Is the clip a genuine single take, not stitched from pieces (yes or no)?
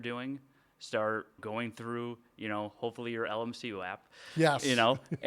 no